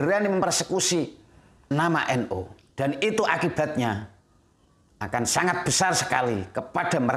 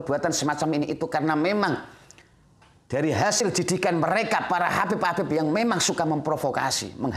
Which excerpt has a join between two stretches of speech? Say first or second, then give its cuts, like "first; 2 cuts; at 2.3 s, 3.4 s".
first; 1 cut; at 2.6 s